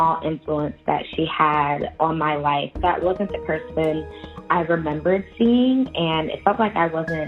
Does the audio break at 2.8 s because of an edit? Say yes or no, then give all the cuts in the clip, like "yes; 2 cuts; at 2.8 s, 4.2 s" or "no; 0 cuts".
yes; 1 cut; at 2.8 s